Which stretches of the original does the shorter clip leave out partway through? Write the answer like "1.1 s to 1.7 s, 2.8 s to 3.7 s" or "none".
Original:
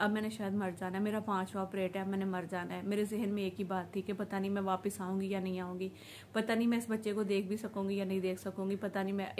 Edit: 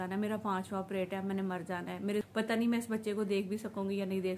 3.1 s to 6.2 s